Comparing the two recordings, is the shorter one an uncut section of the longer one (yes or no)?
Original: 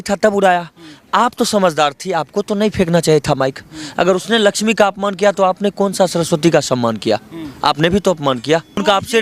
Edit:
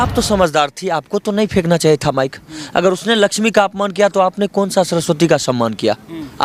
yes